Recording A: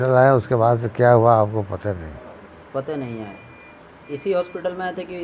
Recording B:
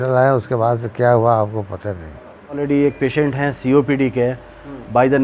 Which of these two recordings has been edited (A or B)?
B